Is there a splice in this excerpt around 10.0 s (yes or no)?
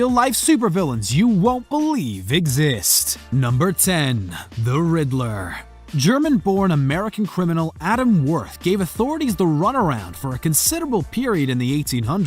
yes